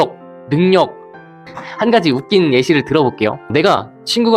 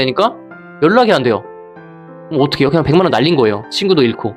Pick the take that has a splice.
first; 1 cut; at 1.4 s

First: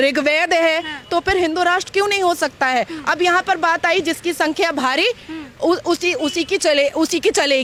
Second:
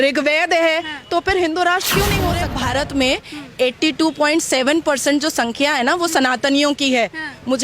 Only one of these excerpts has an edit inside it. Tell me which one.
second; 1 cut; at 2.5 s

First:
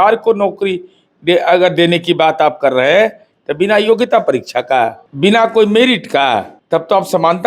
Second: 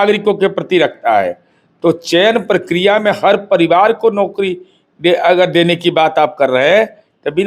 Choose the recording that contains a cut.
first; 2 cuts; at 5.0 s, 6.5 s

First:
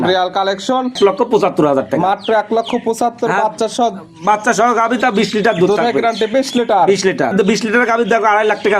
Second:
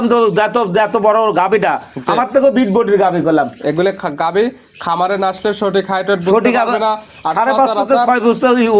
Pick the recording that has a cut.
first; 2 cuts; at 0.9 s, 7.3 s

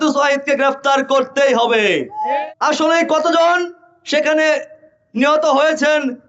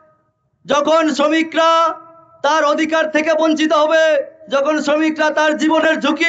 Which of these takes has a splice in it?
first; 1 cut; at 2.4 s

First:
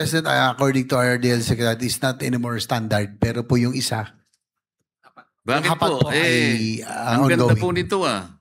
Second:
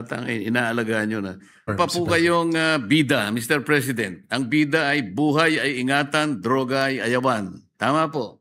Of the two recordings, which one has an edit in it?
second; 1 cut; at 1.7 s

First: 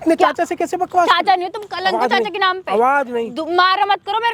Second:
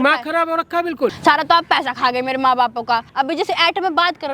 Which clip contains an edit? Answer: second; 2 cuts; at 1.2 s, 3.1 s

